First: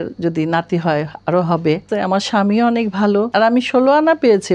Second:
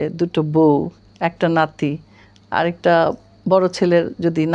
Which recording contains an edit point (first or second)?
first